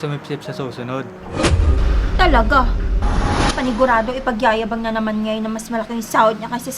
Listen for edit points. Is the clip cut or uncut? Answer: uncut